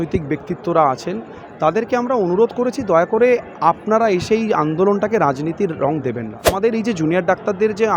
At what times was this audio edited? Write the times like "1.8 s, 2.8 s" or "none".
6.5 s